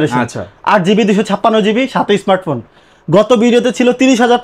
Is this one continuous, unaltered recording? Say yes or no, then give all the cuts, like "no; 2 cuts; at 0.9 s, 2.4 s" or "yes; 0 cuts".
yes; 0 cuts